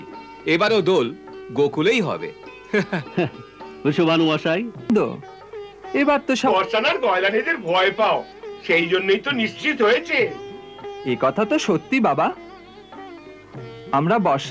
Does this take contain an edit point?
yes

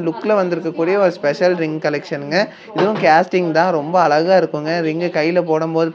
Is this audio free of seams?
yes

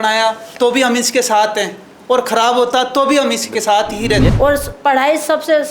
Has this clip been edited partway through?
yes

